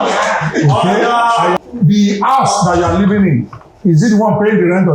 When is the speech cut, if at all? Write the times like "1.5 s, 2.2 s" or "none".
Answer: 1.6 s